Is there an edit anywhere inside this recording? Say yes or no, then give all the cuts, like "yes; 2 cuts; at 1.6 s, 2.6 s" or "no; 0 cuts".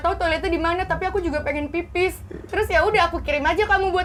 no; 0 cuts